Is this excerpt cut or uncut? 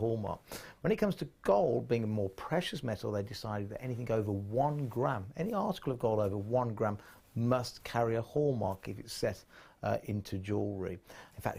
uncut